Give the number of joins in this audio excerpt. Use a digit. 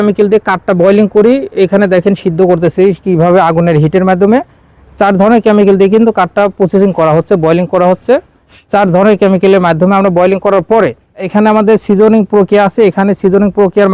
0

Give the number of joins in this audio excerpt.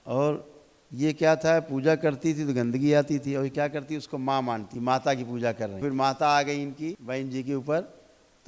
3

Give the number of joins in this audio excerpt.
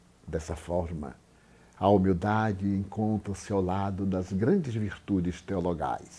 1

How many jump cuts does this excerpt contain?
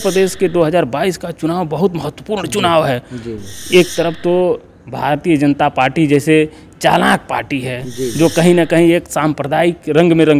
0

